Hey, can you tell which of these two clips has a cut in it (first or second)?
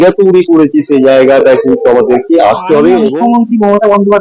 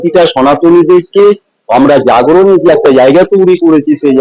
first